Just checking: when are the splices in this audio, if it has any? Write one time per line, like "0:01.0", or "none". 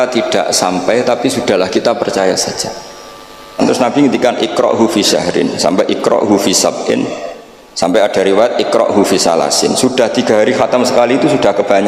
0:03.6